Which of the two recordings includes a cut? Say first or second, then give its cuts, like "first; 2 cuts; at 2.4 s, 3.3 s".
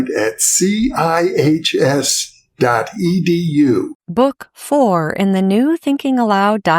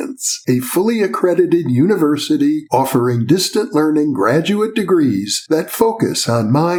first; 1 cut; at 4.0 s